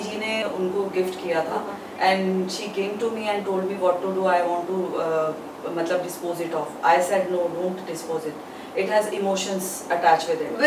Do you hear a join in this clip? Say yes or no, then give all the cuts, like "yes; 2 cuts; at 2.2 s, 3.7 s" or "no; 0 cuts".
no; 0 cuts